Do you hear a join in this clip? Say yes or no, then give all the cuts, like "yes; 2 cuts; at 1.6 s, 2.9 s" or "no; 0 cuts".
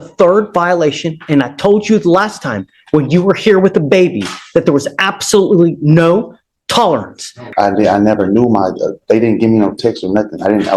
yes; 1 cut; at 7.5 s